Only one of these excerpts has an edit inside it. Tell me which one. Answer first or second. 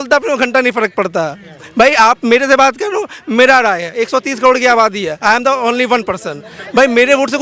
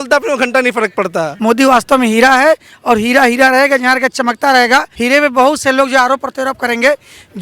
second